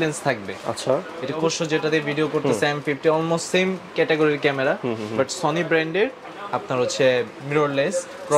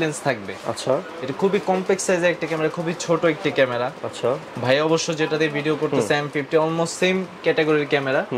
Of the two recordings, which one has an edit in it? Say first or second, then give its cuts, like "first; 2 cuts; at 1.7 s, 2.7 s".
first; 1 cut; at 1.4 s